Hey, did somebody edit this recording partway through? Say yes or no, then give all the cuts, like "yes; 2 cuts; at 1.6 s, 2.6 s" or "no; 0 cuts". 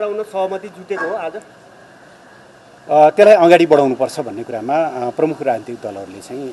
no; 0 cuts